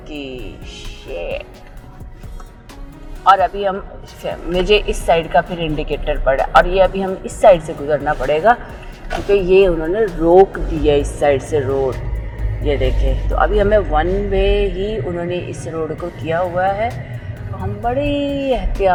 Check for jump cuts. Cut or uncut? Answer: uncut